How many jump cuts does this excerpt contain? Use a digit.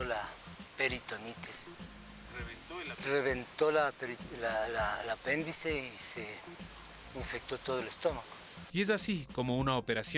0